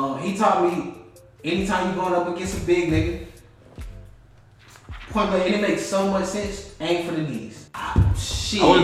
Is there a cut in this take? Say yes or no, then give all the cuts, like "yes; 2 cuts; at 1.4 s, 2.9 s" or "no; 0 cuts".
yes; 1 cut; at 7.7 s